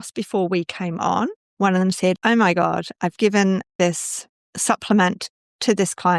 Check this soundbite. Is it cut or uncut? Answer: cut